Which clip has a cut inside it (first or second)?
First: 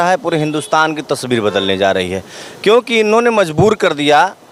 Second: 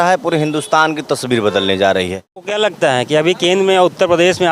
second